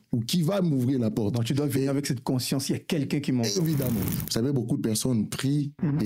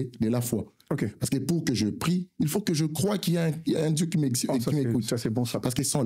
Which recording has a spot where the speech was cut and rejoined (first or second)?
first